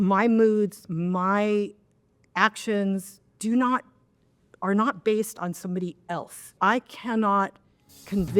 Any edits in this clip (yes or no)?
yes